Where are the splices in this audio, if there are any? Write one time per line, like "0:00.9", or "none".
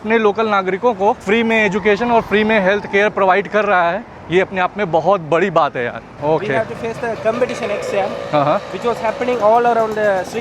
none